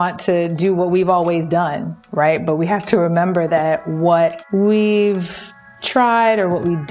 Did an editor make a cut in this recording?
yes; 1 cut; at 4.4 s

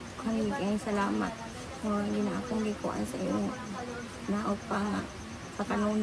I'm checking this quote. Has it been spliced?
no; 0 cuts

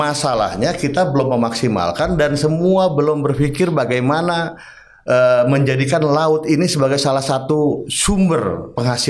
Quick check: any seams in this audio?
no; 0 cuts

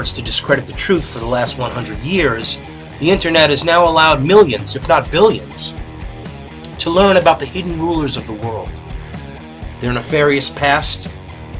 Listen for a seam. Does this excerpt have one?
yes; 1 cut; at 9.6 s

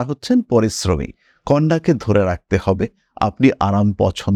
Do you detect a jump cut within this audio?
no; 0 cuts

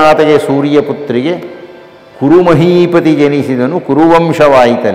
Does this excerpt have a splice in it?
no; 0 cuts

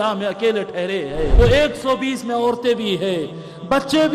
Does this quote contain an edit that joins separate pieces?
yes; 1 cut; at 1.3 s

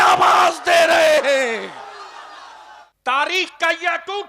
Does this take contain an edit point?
yes; 1 cut; at 2.8 s

